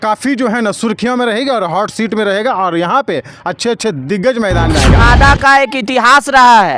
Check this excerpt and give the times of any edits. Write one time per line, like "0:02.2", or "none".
0:05.0